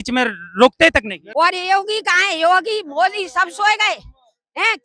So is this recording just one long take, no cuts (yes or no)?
no